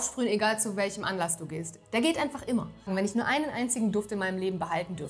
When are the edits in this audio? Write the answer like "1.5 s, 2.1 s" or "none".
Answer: 2.9 s